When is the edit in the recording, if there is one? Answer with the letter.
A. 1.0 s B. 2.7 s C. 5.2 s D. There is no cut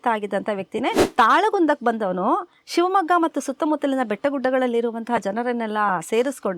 A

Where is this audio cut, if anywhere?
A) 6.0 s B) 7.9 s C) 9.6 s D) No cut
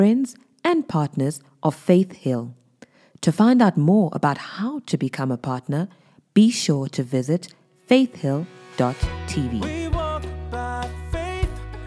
C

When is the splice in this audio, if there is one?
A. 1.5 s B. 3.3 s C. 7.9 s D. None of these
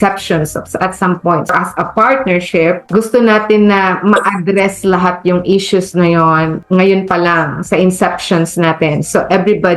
A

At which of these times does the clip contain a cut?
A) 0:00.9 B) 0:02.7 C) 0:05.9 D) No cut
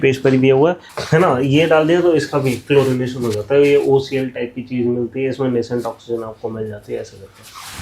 A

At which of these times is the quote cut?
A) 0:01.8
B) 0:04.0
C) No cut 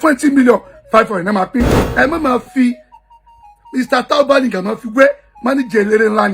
A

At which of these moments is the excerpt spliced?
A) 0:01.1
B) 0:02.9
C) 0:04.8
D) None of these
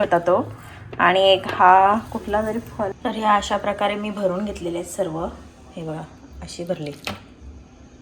B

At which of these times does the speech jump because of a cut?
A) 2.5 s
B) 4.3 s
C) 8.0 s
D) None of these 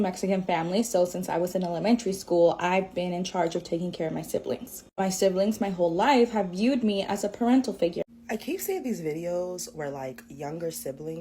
C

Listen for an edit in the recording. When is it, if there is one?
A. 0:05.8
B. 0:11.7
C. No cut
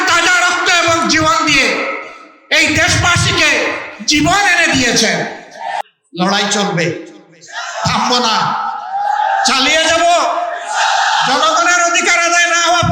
A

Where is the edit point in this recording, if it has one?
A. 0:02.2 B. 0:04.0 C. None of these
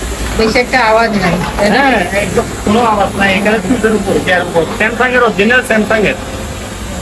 C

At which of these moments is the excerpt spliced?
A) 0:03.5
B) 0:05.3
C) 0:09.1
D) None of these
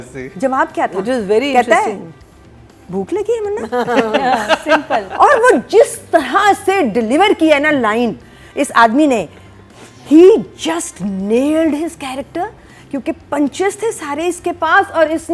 D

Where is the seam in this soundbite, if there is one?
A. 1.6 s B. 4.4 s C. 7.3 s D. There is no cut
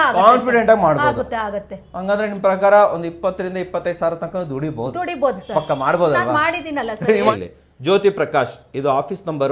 C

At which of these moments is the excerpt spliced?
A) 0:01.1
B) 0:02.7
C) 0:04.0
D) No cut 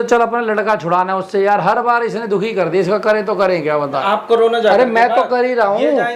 C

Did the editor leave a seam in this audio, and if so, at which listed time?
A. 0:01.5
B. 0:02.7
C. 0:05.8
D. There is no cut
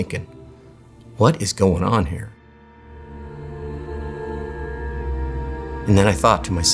C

